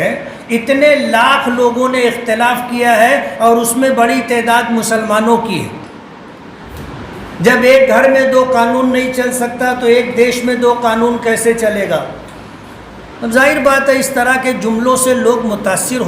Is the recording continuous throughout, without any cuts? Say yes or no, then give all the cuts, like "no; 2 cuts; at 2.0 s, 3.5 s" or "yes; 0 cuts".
no; 1 cut; at 6.7 s